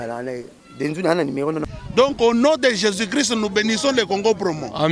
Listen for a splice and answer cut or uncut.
cut